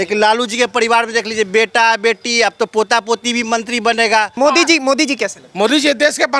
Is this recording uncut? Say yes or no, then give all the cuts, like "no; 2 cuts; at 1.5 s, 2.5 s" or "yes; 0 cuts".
no; 1 cut; at 4.4 s